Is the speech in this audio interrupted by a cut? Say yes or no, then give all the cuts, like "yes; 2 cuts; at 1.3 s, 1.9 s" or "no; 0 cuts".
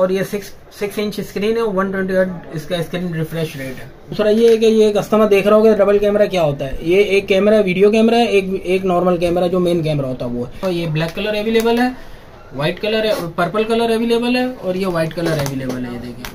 yes; 2 cuts; at 4.1 s, 10.6 s